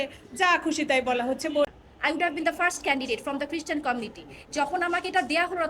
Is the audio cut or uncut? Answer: cut